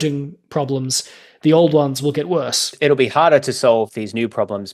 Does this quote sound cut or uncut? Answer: cut